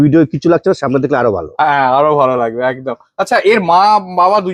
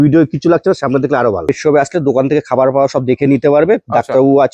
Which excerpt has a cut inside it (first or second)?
second